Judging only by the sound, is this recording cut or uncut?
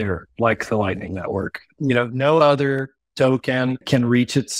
uncut